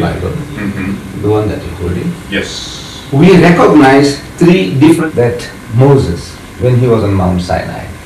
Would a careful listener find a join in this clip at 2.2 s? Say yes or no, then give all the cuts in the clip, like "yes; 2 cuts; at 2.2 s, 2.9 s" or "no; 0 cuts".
no; 1 cut; at 5.0 s